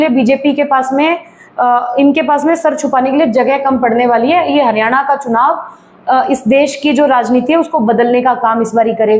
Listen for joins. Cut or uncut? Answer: uncut